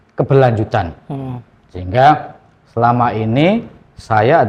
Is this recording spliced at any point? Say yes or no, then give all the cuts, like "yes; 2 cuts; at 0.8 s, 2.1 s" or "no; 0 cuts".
no; 0 cuts